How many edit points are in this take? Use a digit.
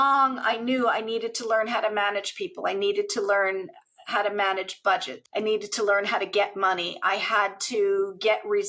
1